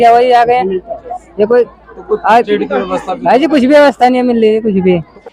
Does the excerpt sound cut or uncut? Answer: uncut